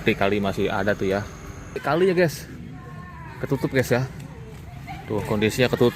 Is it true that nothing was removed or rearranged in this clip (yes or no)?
no